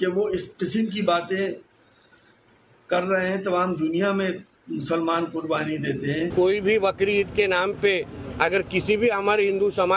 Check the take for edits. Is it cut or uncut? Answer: cut